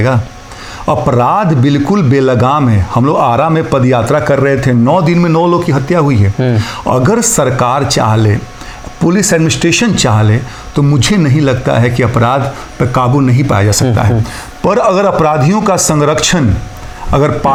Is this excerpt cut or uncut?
uncut